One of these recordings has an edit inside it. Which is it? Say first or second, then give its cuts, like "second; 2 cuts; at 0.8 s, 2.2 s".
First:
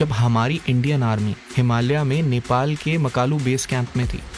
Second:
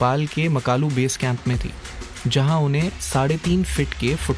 first; 1 cut; at 1.4 s